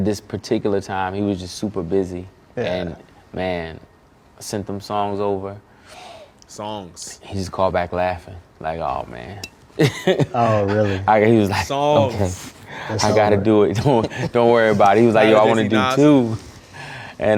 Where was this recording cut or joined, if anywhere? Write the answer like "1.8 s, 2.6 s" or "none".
none